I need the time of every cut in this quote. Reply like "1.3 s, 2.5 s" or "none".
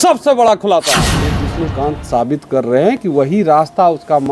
1.5 s